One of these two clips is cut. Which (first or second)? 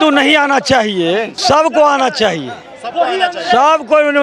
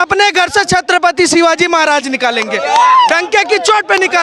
first